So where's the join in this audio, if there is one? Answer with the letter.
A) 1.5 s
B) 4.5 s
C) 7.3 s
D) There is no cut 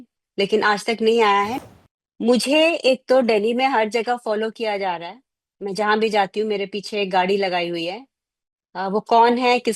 A